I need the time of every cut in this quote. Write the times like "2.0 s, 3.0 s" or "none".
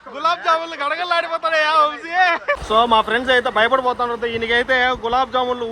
2.6 s